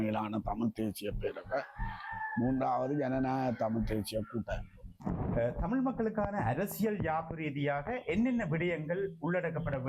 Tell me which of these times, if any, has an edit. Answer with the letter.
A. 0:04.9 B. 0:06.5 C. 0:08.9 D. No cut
A